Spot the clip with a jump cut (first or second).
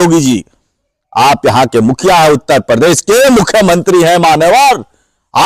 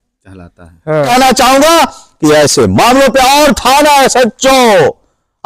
second